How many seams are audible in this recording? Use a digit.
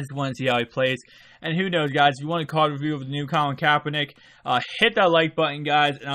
1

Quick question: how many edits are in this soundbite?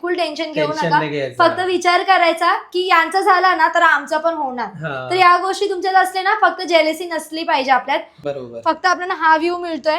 1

